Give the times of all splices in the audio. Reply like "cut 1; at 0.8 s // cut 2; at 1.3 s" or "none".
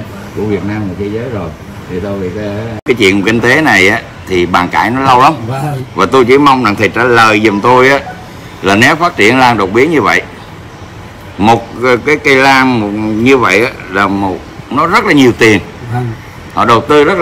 cut 1; at 2.8 s